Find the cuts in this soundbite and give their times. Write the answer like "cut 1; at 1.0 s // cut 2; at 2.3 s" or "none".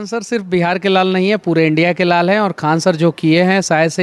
none